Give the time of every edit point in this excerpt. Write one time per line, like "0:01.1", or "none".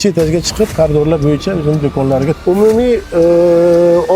0:02.4